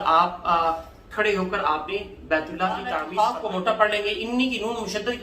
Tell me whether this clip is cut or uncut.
cut